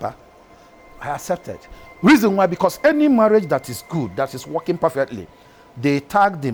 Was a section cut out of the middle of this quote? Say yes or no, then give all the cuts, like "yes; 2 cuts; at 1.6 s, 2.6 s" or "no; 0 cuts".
no; 0 cuts